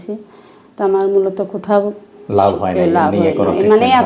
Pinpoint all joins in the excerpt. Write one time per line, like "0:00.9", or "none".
none